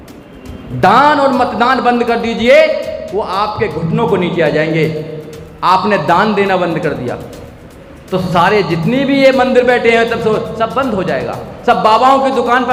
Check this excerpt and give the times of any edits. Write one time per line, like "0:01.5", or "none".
none